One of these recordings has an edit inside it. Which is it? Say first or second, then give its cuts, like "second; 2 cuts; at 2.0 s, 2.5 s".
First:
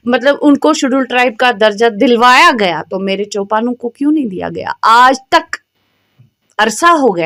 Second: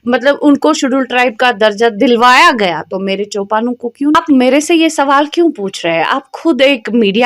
second; 1 cut; at 4.1 s